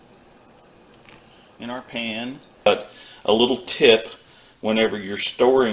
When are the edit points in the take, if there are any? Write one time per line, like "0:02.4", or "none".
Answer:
0:02.7